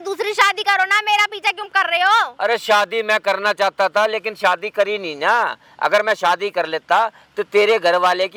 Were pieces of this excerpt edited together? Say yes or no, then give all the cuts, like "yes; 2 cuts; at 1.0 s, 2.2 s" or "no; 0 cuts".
no; 0 cuts